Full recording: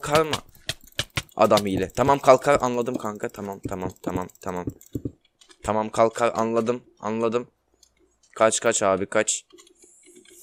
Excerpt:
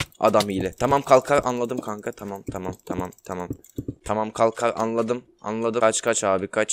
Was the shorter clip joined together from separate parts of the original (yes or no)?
yes